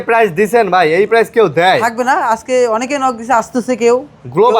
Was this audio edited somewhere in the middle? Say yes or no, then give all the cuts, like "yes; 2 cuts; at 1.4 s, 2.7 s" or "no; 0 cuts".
no; 0 cuts